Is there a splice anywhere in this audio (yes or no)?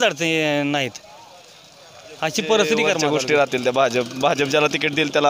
yes